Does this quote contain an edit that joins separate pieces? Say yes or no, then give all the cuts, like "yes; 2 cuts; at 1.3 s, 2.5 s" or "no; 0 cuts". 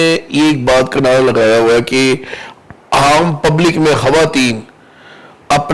no; 0 cuts